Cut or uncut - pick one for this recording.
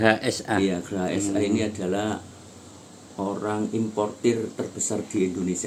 uncut